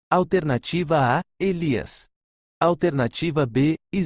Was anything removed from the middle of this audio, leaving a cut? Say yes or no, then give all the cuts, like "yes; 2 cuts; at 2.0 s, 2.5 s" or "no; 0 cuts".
no; 0 cuts